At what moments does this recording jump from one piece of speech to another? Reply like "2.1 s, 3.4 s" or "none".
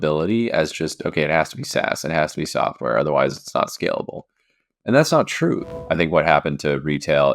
5.6 s